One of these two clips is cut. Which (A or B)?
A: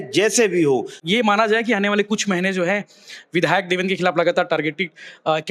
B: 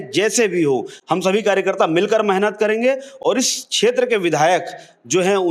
A